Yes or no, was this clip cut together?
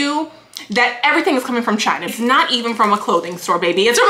yes